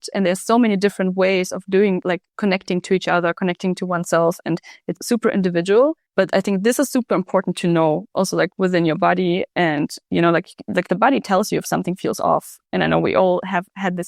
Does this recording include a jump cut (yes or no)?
no